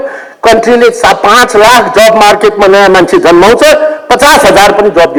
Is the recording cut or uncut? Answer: uncut